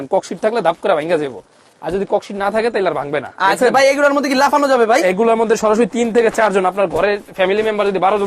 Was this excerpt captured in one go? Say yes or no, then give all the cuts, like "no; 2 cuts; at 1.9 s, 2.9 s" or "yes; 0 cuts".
yes; 0 cuts